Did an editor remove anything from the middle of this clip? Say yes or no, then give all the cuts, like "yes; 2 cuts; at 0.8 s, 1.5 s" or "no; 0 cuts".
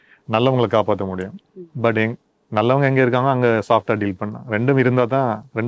no; 0 cuts